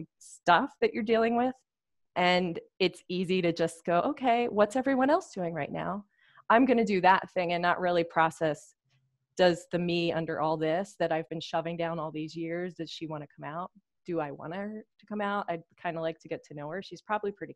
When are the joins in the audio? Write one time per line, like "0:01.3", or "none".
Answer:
none